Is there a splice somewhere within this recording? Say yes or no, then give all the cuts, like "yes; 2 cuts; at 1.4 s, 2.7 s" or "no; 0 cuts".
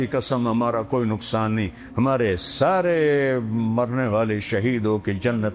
no; 0 cuts